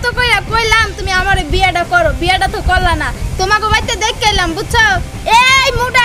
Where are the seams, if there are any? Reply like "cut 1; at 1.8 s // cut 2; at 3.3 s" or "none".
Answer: none